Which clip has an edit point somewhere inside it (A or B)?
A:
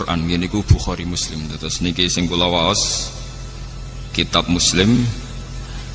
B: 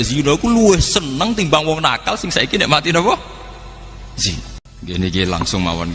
B